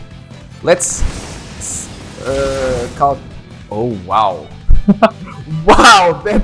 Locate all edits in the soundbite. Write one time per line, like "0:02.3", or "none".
none